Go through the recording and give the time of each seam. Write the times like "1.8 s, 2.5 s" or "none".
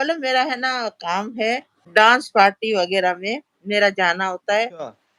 1.8 s